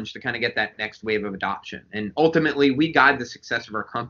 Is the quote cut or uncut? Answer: uncut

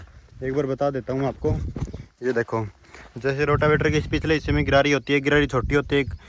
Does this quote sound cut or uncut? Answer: uncut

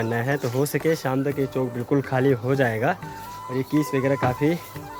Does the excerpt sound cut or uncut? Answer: uncut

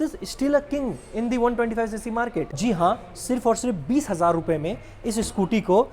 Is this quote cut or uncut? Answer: cut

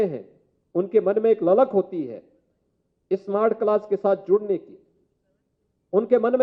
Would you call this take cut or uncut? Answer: uncut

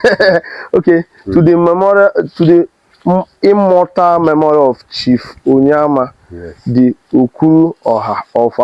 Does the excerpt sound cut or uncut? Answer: uncut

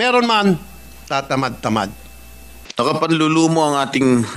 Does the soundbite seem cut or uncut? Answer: cut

